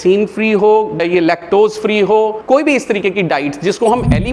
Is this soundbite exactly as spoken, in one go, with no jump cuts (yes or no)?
no